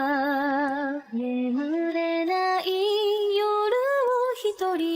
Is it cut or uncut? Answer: cut